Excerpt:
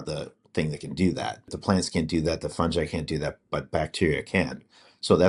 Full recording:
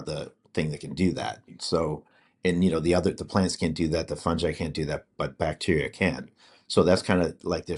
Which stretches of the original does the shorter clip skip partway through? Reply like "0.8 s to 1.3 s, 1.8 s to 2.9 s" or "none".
1.6 s to 3.2 s